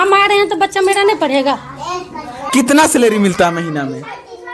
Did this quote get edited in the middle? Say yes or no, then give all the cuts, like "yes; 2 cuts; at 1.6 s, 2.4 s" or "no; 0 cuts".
yes; 1 cut; at 2.3 s